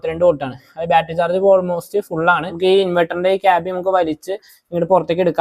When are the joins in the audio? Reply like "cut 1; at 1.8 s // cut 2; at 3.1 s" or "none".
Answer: cut 1; at 2.5 s